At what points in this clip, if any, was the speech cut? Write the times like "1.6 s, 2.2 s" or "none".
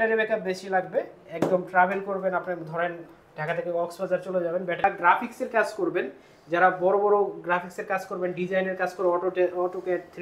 4.8 s